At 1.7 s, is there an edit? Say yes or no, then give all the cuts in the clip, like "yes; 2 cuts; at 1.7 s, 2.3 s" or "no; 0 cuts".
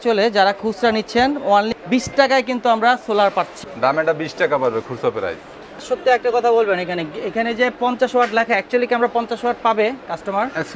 yes; 3 cuts; at 1.7 s, 3.6 s, 5.8 s